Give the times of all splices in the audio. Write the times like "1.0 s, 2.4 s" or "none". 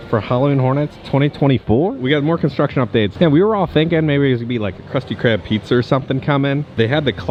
none